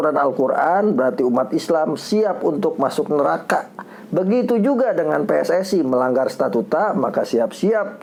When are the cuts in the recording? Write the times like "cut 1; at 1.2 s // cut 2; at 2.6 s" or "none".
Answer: none